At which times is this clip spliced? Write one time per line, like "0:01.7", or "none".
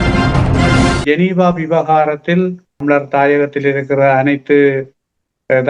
0:01.0